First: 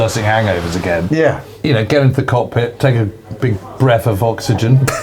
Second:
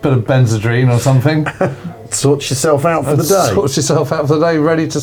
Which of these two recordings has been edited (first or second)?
first